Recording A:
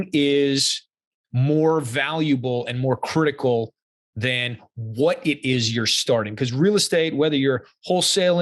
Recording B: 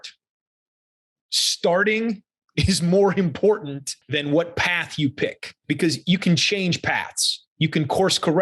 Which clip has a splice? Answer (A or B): B